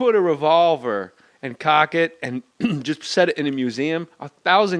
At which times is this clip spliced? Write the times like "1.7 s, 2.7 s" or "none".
1.0 s